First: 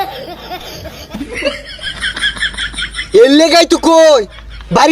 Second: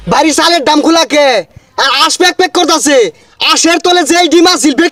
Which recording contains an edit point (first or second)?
first